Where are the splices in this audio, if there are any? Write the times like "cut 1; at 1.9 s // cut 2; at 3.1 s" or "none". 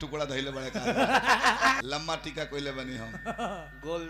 cut 1; at 1.8 s

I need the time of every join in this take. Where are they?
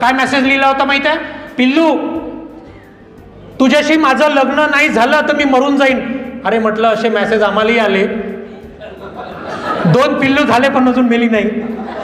none

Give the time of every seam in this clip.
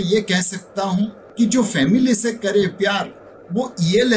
cut 1; at 1.2 s

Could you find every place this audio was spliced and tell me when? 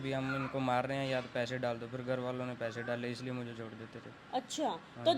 none

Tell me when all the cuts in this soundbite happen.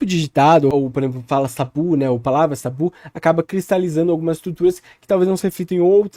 none

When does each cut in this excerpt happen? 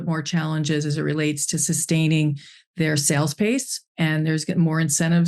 none

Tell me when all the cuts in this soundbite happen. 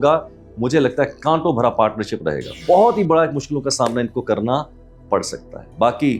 cut 1; at 2.5 s

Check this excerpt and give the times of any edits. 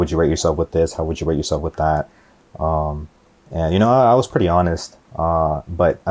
none

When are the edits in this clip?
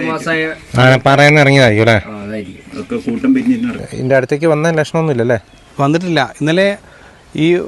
cut 1; at 3.9 s

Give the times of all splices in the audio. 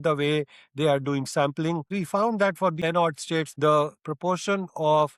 cut 1; at 1.9 s // cut 2; at 3.0 s

